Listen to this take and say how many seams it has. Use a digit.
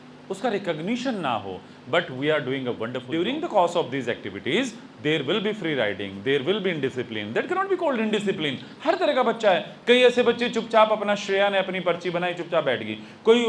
1